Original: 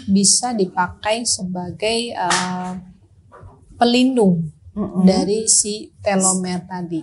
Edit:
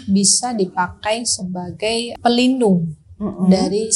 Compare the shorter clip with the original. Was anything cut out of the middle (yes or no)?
yes